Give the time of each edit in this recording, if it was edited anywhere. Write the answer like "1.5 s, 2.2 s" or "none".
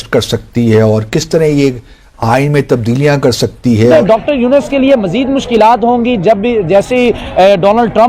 3.9 s